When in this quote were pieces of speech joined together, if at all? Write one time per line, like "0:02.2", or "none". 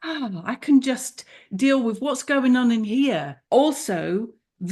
0:03.3